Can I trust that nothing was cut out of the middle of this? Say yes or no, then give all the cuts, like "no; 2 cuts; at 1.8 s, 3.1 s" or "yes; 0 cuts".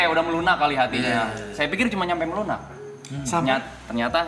yes; 0 cuts